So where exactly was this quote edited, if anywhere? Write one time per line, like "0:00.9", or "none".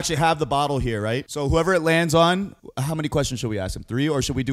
0:01.3
0:02.7